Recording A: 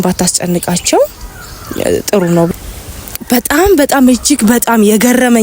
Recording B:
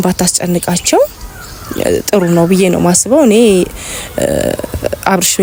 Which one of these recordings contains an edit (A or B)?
A